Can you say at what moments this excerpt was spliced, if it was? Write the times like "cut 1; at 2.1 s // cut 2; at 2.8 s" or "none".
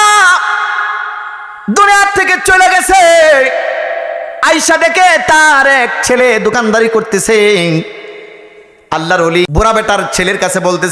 cut 1; at 9.5 s